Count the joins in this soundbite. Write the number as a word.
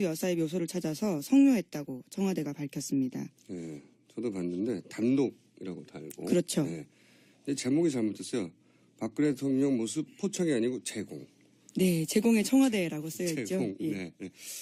zero